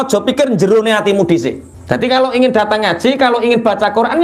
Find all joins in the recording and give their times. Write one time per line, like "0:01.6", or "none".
0:01.7